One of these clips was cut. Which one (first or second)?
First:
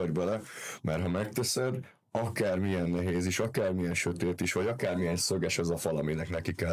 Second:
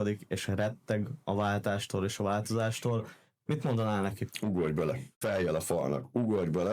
second